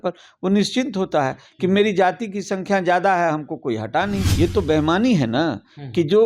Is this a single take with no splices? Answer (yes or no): no